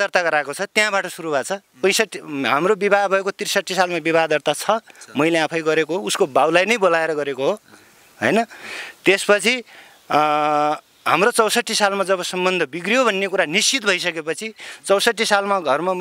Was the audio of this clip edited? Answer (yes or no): no